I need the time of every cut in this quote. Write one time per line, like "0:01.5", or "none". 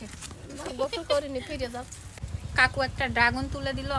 0:02.2